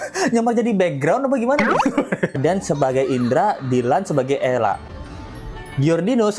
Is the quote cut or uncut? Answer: cut